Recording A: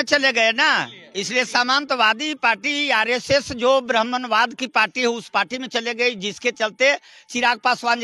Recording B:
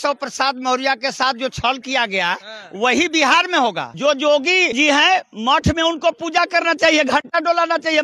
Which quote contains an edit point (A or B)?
B